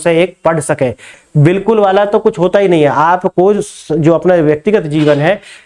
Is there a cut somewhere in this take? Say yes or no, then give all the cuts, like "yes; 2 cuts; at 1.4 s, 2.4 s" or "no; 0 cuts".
yes; 1 cut; at 1.1 s